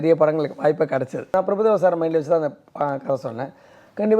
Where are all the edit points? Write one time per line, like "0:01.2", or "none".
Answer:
0:01.3